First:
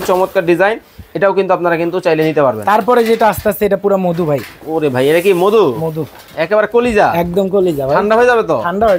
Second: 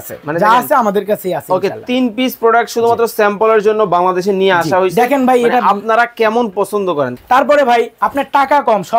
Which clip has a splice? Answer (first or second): second